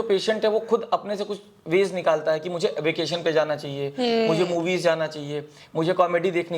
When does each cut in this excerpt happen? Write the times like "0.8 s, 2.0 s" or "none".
none